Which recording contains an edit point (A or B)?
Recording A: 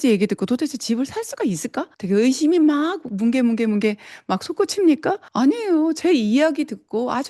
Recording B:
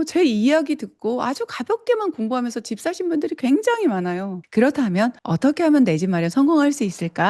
B